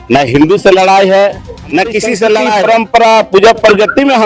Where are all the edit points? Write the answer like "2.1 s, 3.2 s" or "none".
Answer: 2.6 s